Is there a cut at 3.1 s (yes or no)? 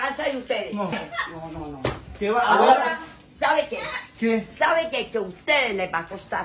no